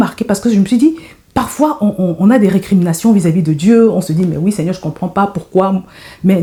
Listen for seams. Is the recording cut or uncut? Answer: uncut